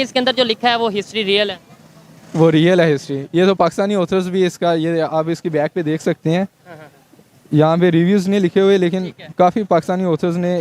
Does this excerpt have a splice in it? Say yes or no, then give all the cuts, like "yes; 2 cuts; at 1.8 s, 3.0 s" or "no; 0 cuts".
no; 0 cuts